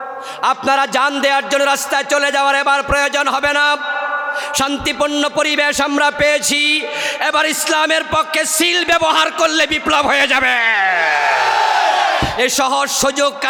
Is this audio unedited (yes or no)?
yes